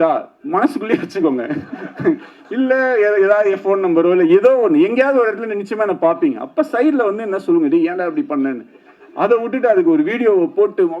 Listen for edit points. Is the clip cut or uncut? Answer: uncut